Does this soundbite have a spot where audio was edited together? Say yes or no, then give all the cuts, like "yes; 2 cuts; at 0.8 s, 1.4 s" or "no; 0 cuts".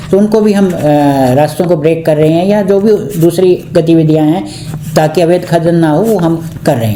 no; 0 cuts